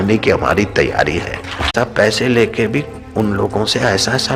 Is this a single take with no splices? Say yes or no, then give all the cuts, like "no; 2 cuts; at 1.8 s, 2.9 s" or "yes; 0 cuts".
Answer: no; 1 cut; at 1.7 s